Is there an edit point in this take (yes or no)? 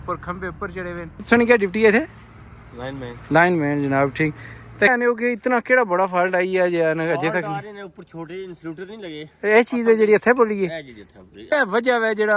yes